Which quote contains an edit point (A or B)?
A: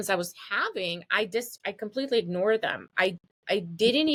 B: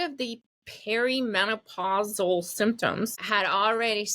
B